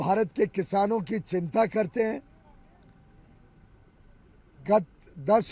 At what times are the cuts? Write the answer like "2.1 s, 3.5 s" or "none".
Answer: none